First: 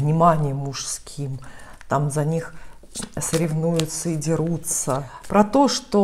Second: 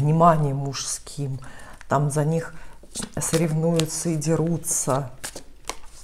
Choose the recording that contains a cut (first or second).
first